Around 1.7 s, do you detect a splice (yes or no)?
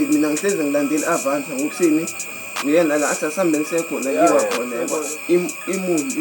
no